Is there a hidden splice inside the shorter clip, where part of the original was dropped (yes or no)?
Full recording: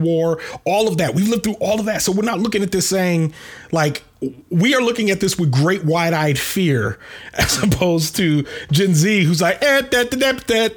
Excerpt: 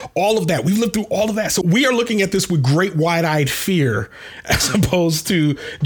yes